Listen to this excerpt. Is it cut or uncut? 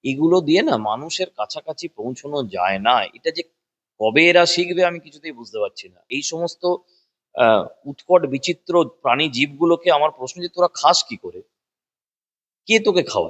cut